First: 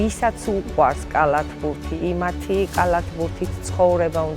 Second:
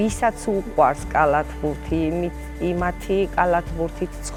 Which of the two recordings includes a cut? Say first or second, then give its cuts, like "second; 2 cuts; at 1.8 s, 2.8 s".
first; 1 cut; at 1.9 s